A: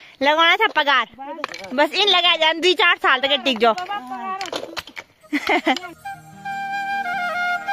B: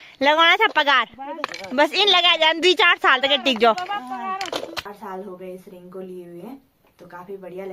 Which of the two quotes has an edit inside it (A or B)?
B